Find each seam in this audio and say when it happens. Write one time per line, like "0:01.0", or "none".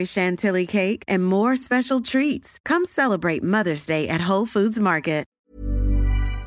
0:05.4